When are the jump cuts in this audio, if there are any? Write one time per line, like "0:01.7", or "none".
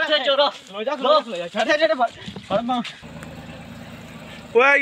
0:03.1